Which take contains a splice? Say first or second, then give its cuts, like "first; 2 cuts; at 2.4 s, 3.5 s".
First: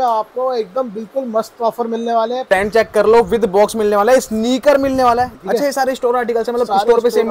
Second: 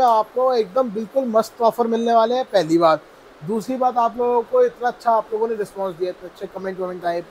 first; 2 cuts; at 2.5 s, 5.4 s